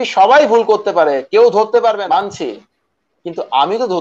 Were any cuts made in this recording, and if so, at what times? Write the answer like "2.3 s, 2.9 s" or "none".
2.0 s